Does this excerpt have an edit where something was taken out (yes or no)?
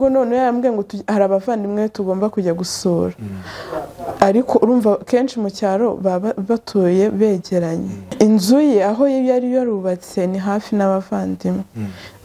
yes